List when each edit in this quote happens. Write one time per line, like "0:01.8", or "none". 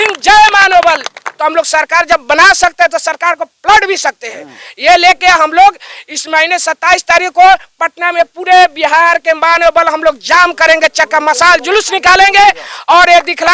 0:01.3